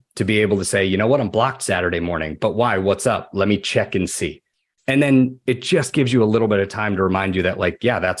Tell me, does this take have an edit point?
no; 0 cuts

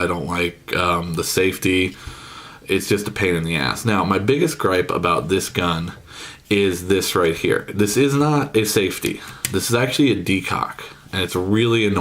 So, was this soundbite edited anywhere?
yes; 1 cut; at 4.5 s

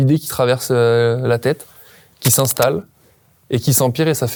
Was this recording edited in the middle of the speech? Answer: no; 0 cuts

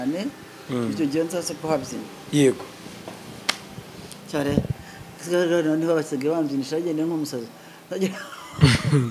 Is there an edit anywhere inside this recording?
no; 0 cuts

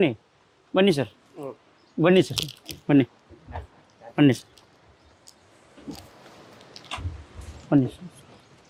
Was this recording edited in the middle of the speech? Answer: no; 0 cuts

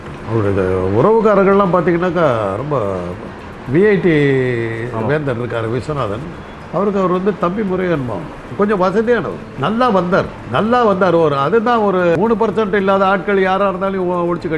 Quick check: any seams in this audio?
yes; 4 cuts; at 8.4 s, 9.4 s, 10.4 s, 12.1 s

